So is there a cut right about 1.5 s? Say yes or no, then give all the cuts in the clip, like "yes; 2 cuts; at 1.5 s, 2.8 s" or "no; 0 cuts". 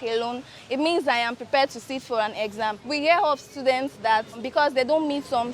no; 2 cuts; at 2.8 s, 4.4 s